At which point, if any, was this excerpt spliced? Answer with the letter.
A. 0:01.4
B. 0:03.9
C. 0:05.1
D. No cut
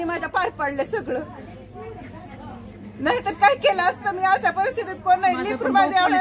D